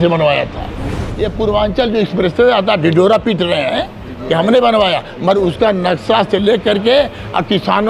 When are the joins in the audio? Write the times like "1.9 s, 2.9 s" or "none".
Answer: 1.1 s